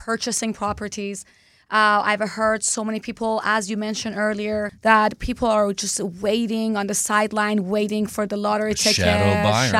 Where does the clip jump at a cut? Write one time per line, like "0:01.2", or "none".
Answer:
0:04.7